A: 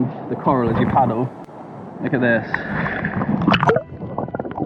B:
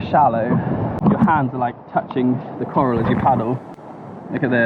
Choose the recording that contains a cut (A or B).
B